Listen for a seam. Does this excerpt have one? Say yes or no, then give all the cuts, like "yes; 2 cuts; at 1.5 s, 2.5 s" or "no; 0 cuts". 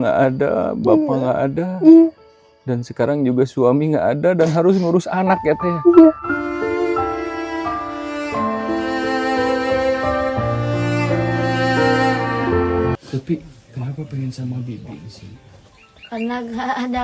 yes; 1 cut; at 12.9 s